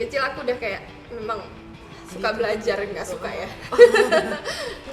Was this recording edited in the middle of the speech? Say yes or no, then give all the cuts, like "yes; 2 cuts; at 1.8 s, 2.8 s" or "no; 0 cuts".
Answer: no; 0 cuts